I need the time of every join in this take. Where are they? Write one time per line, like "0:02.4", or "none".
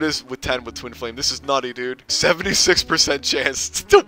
0:02.1